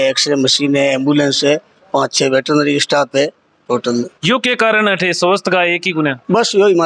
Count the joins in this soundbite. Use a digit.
0